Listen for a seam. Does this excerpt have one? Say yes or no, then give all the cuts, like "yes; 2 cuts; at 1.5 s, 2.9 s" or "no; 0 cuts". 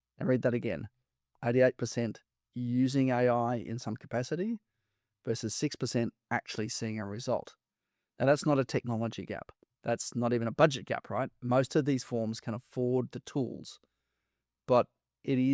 no; 0 cuts